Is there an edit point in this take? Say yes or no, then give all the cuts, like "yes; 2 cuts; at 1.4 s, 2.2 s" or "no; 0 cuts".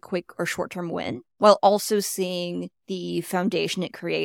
yes; 2 cuts; at 1.3 s, 2.8 s